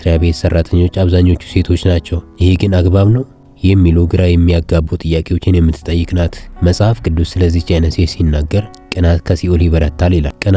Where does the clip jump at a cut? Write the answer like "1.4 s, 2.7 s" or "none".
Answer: none